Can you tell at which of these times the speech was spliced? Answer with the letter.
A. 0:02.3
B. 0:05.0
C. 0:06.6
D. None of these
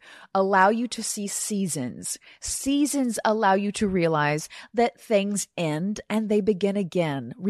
D